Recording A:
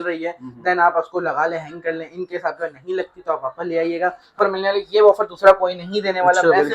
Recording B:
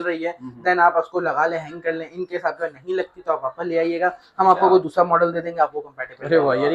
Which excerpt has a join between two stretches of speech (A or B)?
A